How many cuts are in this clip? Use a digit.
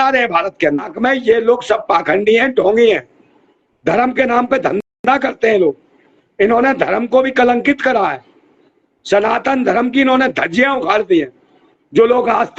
1